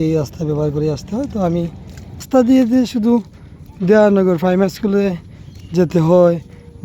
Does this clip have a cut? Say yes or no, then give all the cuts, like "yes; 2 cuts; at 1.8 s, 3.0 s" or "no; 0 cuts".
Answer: yes; 1 cut; at 2.2 s